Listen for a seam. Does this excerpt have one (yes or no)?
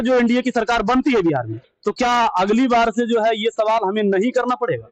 no